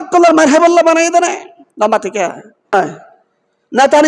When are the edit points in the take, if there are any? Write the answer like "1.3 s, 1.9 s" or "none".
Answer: 2.7 s